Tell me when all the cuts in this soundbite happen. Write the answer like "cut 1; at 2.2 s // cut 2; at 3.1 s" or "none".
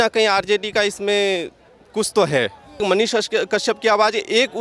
cut 1; at 2.8 s